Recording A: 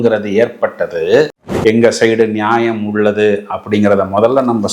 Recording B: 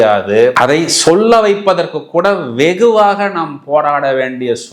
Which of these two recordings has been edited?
A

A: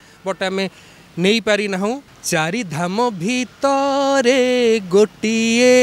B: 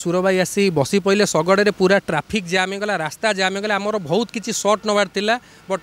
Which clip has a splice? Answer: A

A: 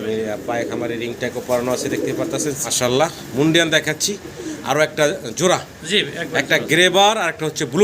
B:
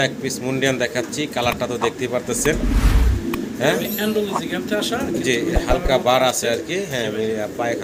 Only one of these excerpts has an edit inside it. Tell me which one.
A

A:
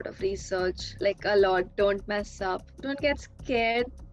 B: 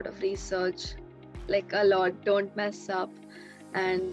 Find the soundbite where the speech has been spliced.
A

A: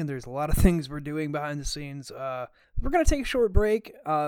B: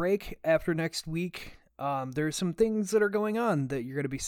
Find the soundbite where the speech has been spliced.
A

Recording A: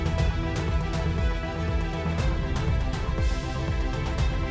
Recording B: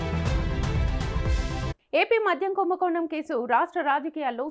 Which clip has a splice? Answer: B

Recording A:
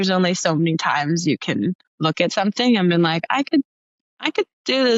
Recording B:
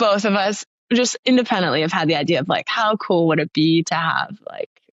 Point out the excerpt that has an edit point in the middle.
A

